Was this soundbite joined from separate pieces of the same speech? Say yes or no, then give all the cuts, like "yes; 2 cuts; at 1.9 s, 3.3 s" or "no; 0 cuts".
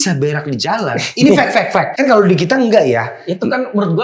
yes; 1 cut; at 1.9 s